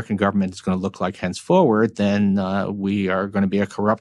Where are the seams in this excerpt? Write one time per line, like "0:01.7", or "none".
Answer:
none